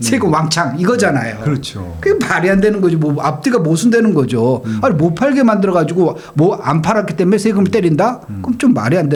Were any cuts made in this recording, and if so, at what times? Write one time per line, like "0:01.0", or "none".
none